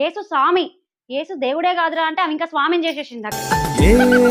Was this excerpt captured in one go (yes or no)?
yes